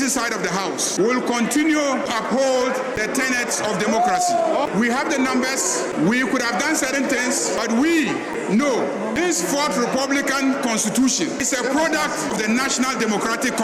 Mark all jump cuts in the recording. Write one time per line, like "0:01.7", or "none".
0:00.9
0:02.1
0:03.0
0:04.5
0:05.9
0:07.6
0:09.2
0:11.4
0:12.3